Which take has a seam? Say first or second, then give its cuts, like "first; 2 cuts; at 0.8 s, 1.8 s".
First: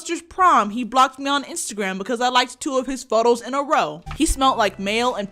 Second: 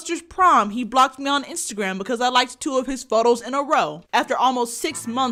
first; 1 cut; at 4.0 s